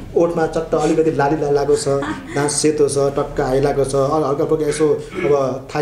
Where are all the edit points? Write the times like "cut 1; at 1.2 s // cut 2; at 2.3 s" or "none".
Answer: none